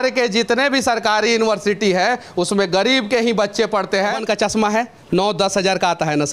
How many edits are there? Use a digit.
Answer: 1